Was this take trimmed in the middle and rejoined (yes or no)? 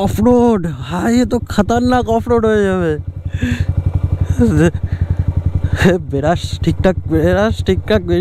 no